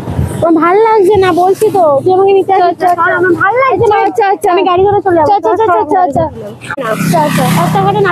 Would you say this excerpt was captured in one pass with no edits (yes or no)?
no